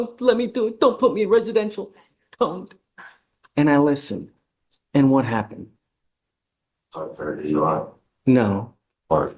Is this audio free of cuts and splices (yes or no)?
yes